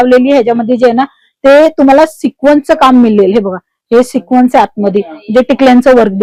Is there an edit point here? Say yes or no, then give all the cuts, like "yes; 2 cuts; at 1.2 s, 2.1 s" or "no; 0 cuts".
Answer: no; 0 cuts